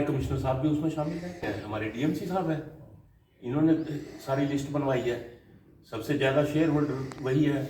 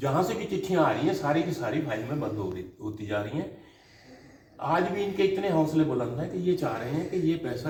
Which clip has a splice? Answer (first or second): first